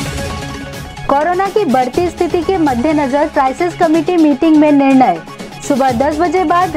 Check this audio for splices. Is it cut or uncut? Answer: cut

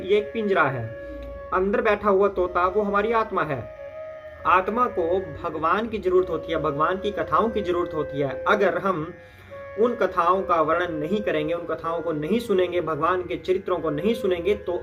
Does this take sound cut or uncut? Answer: uncut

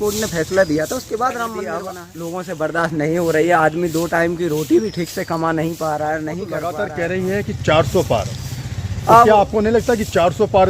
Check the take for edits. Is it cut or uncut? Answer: cut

